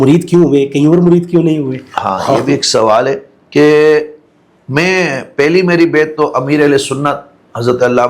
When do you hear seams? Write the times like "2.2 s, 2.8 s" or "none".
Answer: none